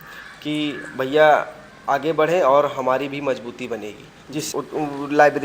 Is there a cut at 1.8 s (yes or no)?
no